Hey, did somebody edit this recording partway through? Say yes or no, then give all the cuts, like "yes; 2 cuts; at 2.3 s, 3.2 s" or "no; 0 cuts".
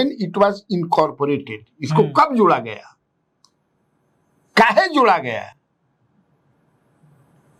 no; 0 cuts